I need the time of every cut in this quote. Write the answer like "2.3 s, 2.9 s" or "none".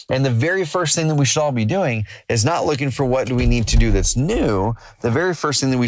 none